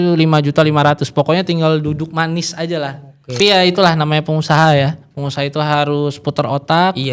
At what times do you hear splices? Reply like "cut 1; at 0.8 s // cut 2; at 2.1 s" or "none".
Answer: cut 1; at 3.3 s